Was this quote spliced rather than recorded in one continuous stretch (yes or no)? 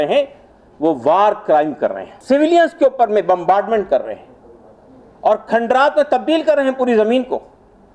yes